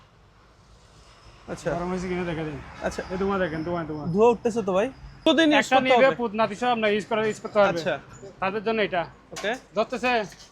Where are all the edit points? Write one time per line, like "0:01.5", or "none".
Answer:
0:05.2